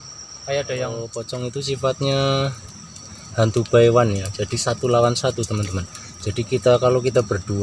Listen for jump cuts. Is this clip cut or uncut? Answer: cut